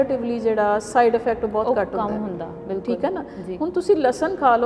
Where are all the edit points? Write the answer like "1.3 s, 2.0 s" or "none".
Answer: none